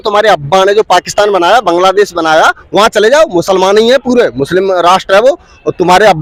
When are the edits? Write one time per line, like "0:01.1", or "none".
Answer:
none